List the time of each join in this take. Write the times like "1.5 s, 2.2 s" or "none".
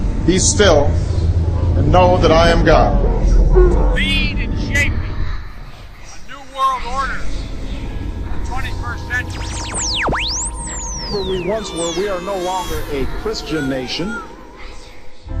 none